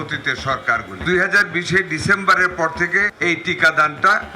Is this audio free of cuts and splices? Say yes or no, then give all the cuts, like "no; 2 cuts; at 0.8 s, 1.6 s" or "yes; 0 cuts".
no; 2 cuts; at 0.9 s, 3.1 s